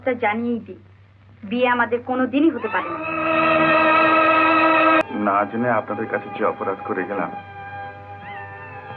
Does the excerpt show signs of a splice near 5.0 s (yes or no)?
yes